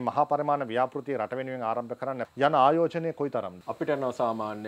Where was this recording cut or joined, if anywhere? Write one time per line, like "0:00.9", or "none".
0:02.2
0:03.6